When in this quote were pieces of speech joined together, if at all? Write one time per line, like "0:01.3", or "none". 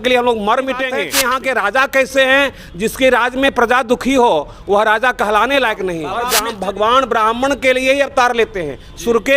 0:01.1
0:06.1